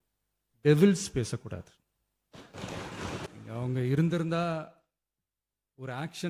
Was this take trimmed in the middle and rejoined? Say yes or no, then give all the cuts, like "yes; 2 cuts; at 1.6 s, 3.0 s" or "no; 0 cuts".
yes; 1 cut; at 3.3 s